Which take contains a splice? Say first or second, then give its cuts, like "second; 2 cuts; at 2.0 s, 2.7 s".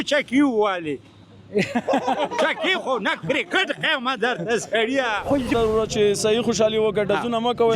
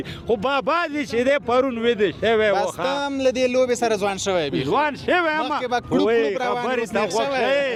first; 1 cut; at 5.5 s